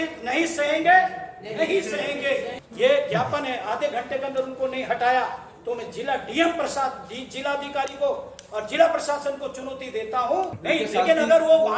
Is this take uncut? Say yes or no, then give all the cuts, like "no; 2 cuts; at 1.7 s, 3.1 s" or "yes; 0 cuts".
no; 2 cuts; at 2.6 s, 10.6 s